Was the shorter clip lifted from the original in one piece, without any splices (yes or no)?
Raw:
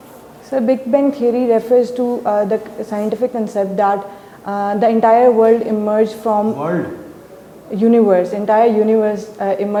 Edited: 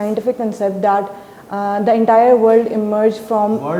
yes